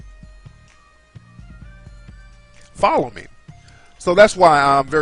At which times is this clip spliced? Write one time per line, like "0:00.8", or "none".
none